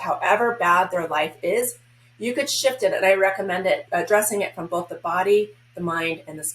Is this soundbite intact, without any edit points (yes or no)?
no